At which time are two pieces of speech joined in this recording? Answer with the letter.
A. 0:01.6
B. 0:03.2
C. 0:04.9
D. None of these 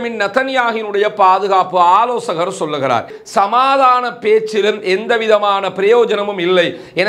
B